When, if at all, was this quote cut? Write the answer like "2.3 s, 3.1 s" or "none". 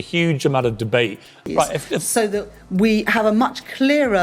1.3 s